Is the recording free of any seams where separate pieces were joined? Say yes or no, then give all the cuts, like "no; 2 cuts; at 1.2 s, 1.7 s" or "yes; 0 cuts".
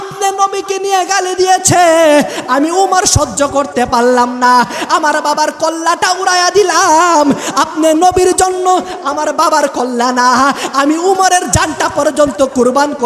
yes; 0 cuts